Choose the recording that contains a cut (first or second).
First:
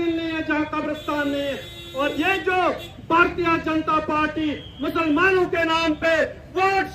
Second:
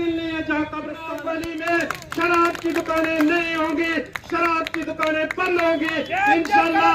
second